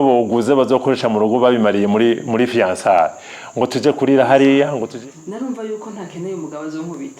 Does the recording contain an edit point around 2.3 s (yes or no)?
no